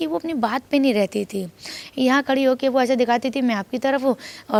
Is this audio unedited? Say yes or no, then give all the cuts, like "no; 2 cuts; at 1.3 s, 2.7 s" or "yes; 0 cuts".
yes; 0 cuts